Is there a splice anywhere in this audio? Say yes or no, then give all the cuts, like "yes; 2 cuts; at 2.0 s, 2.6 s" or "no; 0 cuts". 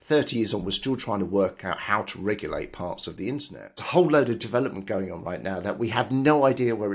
yes; 1 cut; at 3.8 s